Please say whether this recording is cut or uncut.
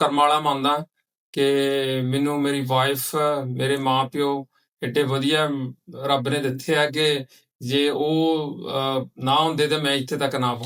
uncut